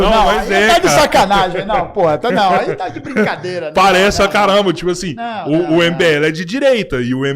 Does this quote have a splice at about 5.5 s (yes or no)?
yes